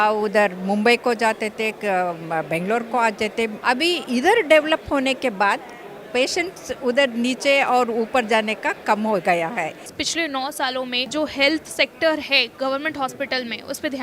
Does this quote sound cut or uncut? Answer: cut